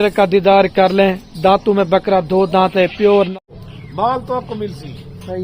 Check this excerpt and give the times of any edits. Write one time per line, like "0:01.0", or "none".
0:03.3